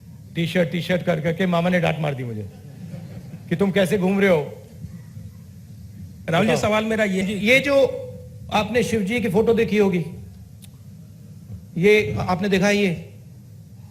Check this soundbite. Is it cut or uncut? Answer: cut